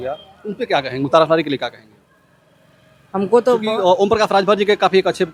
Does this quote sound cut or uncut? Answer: uncut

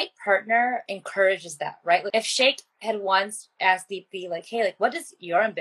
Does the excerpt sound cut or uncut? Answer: cut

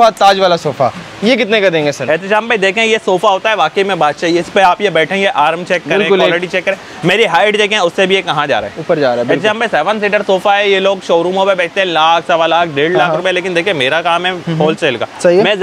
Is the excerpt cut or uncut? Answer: uncut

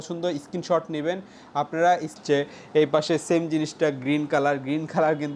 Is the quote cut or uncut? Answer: cut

